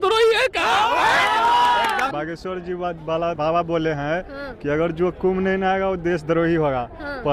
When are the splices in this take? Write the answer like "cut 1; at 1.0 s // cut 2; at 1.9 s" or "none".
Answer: cut 1; at 2.1 s // cut 2; at 3.4 s